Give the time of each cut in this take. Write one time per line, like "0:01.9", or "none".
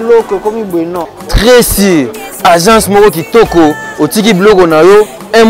0:01.0